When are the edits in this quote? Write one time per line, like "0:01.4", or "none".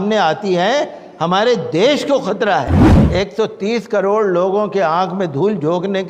0:02.9